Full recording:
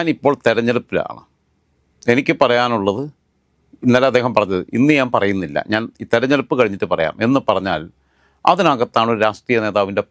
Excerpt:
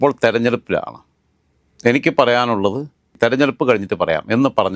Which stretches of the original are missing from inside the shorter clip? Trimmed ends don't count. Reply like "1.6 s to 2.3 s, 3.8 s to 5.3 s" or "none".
3.3 s to 5.9 s